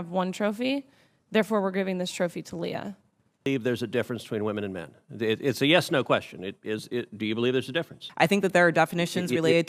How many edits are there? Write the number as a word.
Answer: two